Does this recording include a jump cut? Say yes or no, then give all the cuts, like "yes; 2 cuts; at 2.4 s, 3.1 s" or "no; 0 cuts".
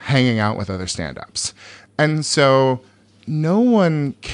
no; 0 cuts